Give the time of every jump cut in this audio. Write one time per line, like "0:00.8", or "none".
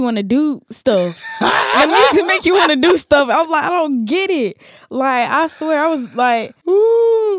none